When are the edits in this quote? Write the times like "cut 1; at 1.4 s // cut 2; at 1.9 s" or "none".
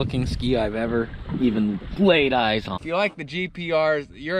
cut 1; at 2.8 s